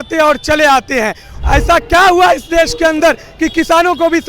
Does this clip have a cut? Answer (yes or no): yes